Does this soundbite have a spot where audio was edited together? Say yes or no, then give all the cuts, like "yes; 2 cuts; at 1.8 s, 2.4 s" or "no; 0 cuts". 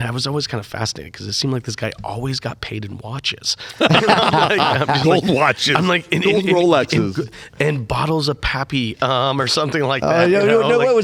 no; 0 cuts